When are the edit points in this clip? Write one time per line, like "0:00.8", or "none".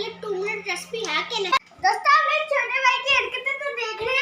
0:01.5